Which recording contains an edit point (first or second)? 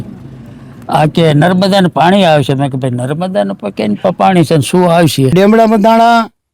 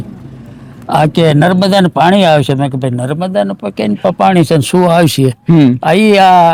first